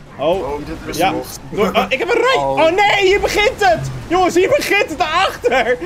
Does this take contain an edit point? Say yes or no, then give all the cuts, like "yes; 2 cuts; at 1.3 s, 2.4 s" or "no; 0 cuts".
no; 0 cuts